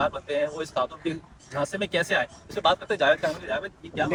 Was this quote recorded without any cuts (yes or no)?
yes